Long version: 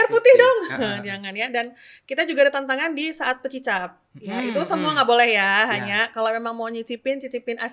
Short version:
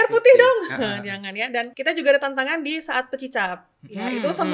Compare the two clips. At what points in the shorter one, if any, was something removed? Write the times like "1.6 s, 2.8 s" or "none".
1.7 s